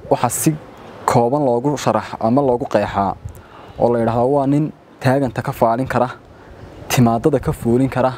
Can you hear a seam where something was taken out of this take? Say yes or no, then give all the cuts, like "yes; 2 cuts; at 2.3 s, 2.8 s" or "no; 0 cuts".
no; 0 cuts